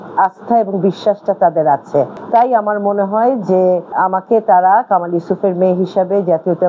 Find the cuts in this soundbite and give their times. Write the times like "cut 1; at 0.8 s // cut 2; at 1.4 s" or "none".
cut 1; at 2.2 s // cut 2; at 3.9 s